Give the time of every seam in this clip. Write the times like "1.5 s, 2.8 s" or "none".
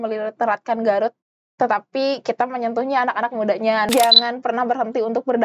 3.9 s